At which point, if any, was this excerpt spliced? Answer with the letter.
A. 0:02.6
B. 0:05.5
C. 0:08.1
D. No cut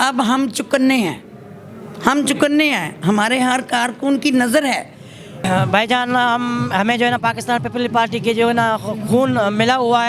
B